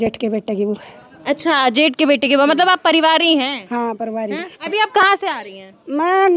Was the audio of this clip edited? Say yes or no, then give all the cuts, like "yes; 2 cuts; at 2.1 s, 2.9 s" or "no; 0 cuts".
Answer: yes; 1 cut; at 4.6 s